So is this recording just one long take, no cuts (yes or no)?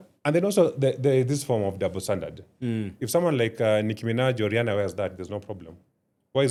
yes